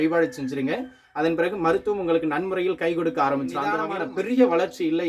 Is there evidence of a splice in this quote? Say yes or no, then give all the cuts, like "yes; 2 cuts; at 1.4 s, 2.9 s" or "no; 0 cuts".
yes; 1 cut; at 3.8 s